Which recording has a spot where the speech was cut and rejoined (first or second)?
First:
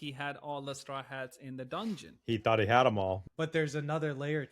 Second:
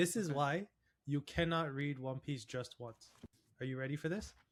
first